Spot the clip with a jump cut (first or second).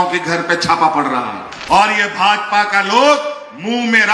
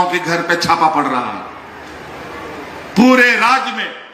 first